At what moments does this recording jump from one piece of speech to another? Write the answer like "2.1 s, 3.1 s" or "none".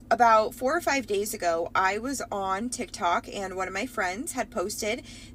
none